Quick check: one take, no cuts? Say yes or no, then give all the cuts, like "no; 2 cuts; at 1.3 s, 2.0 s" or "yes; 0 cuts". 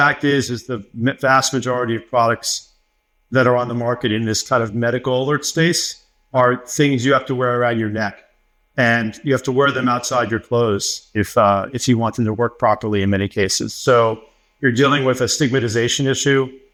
yes; 0 cuts